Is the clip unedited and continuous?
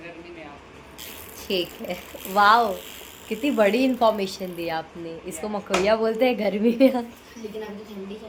yes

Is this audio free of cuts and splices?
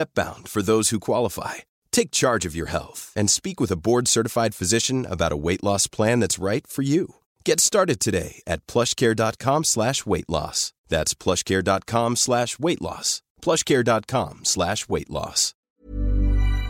no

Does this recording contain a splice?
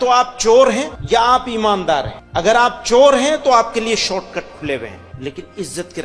yes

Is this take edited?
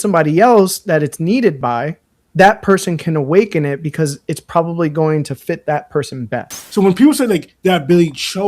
yes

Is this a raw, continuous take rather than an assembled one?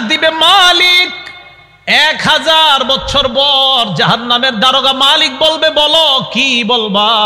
yes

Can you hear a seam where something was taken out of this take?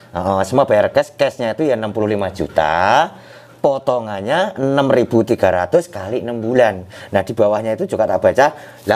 no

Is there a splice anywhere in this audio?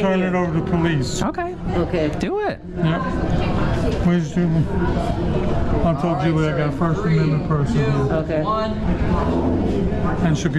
no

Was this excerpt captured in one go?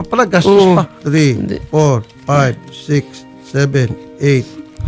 no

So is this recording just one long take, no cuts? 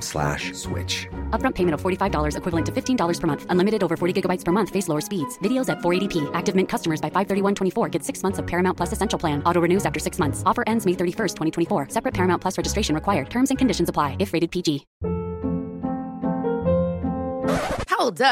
no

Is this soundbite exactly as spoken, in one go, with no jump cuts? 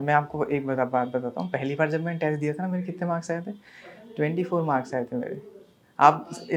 yes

